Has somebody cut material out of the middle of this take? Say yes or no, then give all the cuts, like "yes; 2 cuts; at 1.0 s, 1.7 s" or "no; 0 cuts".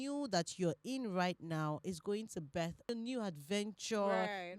yes; 1 cut; at 2.9 s